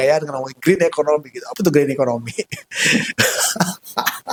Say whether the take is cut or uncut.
uncut